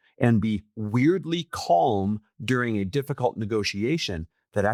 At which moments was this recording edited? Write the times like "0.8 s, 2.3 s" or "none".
none